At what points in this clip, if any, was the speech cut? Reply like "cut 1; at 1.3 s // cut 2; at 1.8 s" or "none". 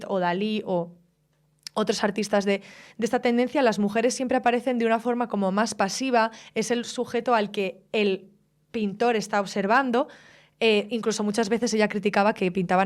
none